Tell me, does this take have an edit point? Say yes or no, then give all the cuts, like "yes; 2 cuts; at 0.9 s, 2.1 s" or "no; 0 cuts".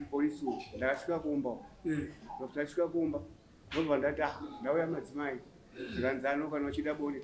no; 0 cuts